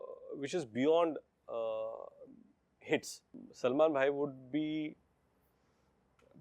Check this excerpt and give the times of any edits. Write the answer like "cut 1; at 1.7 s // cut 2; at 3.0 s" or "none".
cut 1; at 3.3 s